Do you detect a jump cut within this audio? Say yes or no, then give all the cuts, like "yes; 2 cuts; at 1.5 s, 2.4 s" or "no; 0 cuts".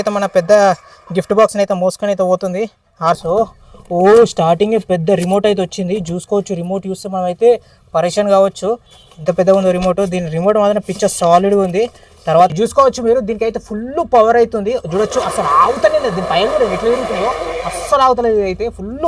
yes; 2 cuts; at 3.1 s, 12.5 s